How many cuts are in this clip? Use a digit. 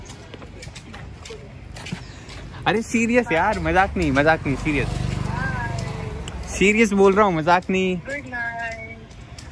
0